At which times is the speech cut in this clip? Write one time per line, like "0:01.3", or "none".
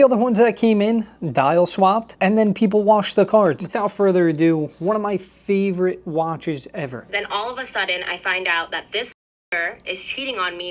0:03.7
0:07.0